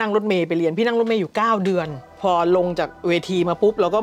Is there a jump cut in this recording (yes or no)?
yes